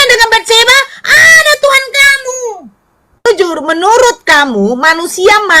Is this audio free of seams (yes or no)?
no